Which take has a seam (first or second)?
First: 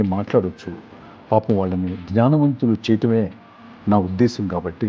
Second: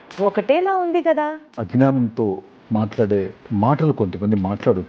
second